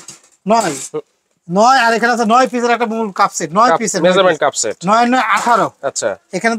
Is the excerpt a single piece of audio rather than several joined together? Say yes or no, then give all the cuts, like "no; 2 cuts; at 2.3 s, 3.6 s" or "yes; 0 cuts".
yes; 0 cuts